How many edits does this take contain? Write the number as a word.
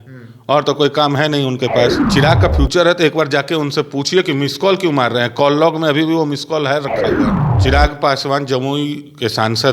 two